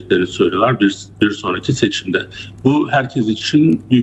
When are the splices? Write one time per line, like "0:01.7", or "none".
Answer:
none